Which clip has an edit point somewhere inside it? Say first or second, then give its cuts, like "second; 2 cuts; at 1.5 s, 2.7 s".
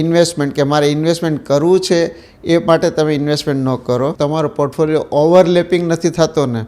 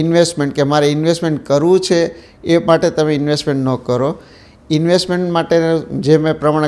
first; 1 cut; at 4.1 s